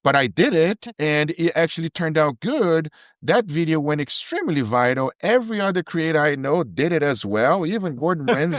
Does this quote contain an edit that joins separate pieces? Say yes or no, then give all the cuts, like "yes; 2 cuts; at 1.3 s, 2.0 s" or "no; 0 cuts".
no; 0 cuts